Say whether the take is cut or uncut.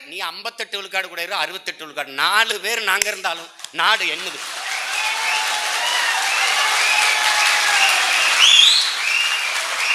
uncut